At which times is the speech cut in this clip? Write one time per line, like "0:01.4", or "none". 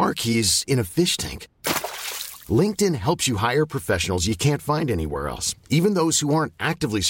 none